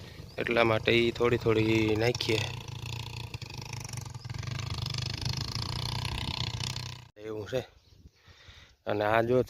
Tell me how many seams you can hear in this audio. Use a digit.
1